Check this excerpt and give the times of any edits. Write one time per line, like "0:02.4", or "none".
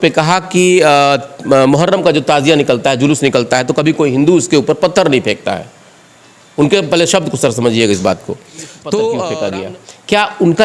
0:09.4